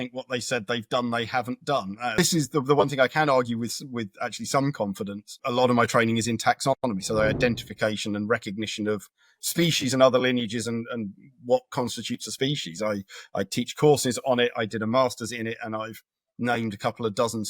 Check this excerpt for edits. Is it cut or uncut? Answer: cut